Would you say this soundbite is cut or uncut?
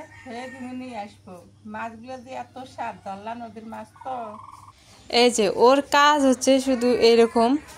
cut